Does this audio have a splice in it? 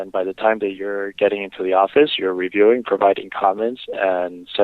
no; 0 cuts

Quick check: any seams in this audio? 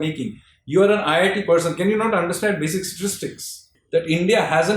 yes; 1 cut; at 3.7 s

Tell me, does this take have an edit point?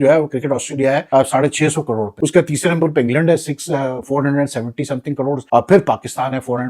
yes; 3 cuts; at 1.0 s, 2.1 s, 5.4 s

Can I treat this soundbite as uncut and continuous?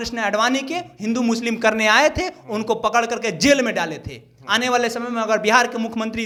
yes; 0 cuts

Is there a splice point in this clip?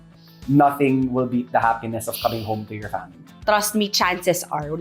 yes; 1 cut; at 3.2 s

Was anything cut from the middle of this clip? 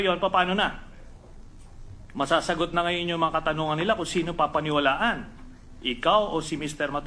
yes; 1 cut; at 3.3 s

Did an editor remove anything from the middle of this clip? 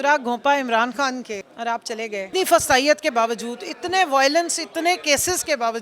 yes; 2 cuts; at 1.5 s, 2.3 s

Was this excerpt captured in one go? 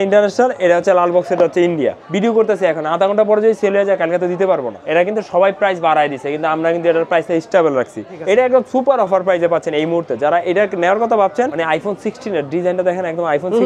no; 4 cuts; at 2.0 s, 4.7 s, 8.1 s, 11.6 s

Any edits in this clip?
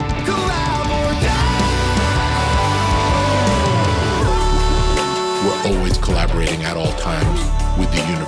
no; 0 cuts

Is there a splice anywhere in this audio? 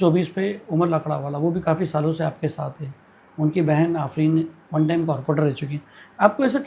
no; 0 cuts

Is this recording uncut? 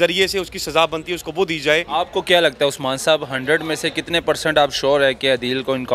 no; 1 cut; at 1.9 s

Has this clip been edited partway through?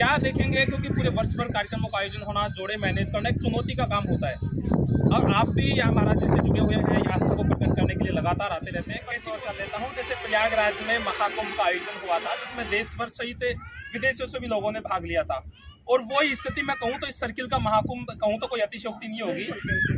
yes; 1 cut; at 9.2 s

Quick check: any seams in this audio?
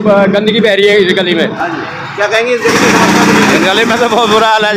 no; 0 cuts

